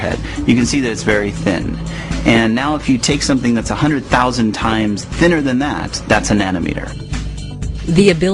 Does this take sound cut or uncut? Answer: cut